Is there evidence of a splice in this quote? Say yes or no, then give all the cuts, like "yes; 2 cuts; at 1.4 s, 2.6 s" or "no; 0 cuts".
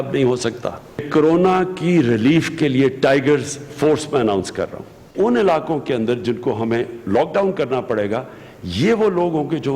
yes; 1 cut; at 5.1 s